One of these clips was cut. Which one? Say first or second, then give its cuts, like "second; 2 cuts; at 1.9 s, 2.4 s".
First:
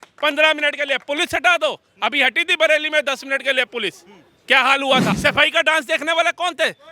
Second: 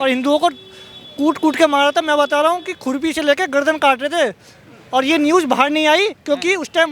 first; 1 cut; at 5.2 s